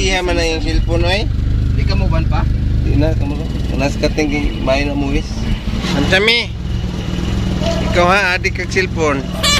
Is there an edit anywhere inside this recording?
yes; 1 cut; at 5.8 s

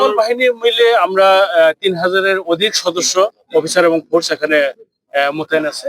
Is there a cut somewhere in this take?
no; 0 cuts

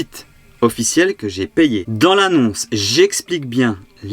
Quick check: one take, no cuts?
no; 1 cut; at 1.8 s

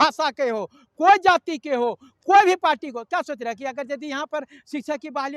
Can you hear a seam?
no; 0 cuts

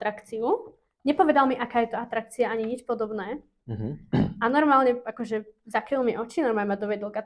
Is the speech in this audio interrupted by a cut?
no; 0 cuts

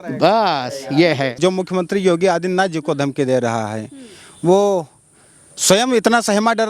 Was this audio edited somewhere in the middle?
yes; 1 cut; at 1.3 s

